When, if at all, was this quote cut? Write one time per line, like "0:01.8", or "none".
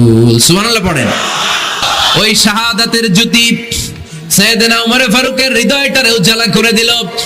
0:01.8